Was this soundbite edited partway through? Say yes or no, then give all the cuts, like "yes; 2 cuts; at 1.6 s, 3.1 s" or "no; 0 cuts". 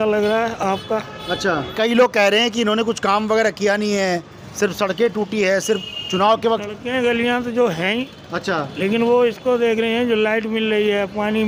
yes; 1 cut; at 1.7 s